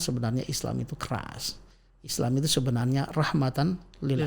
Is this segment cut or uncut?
uncut